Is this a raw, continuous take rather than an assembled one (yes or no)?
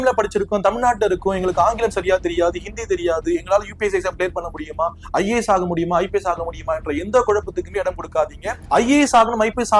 yes